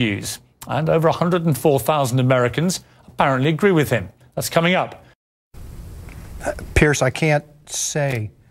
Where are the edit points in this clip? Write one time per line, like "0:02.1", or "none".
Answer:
0:05.8